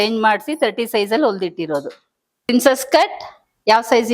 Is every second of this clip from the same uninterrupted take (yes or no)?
no